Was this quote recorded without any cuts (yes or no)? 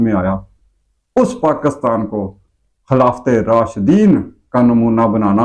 yes